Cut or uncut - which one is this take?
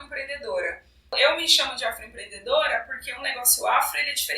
cut